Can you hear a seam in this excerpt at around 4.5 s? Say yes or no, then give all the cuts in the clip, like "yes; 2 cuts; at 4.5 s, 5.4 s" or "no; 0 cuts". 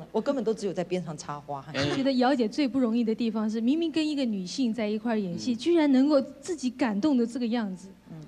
no; 1 cut; at 1.9 s